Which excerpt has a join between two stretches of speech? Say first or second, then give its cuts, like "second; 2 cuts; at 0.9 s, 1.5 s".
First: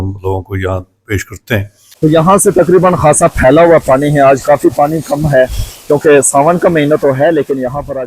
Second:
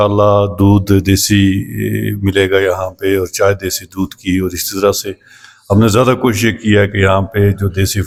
first; 1 cut; at 2.2 s